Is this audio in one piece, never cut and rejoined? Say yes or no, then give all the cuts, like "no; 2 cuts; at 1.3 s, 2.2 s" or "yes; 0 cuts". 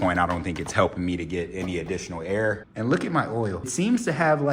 no; 2 cuts; at 2.7 s, 3.7 s